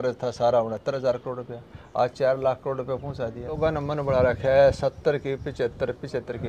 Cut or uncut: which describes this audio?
cut